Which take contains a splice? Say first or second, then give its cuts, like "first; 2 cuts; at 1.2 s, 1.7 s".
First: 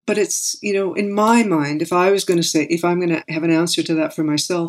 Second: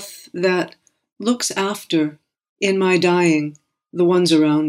first; 1 cut; at 3.3 s